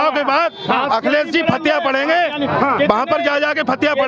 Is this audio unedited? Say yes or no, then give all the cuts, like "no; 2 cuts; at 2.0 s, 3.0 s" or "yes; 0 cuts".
yes; 0 cuts